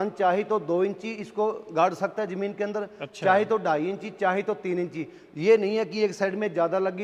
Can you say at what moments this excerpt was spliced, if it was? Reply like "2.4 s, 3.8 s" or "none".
none